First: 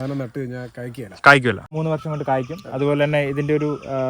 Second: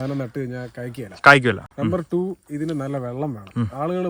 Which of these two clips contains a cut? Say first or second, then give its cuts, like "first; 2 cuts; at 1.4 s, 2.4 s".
first; 1 cut; at 1.7 s